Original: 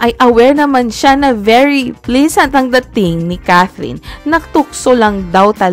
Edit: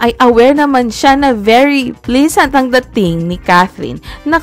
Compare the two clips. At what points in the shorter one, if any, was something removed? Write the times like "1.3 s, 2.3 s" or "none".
none